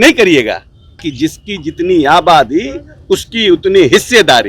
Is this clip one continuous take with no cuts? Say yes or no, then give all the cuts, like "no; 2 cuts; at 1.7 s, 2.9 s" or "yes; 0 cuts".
no; 1 cut; at 1.0 s